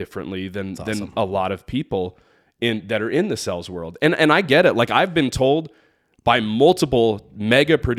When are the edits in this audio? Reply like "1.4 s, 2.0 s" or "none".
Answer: none